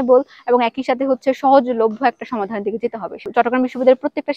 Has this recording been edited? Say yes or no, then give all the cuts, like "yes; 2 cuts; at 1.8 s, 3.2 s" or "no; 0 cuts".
yes; 1 cut; at 3.3 s